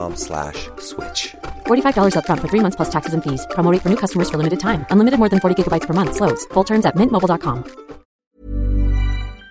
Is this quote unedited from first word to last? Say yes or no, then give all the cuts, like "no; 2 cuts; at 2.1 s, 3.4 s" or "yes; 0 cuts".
no; 1 cut; at 8.2 s